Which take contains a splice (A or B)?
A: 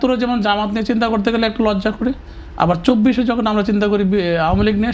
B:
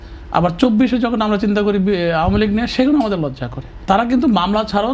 B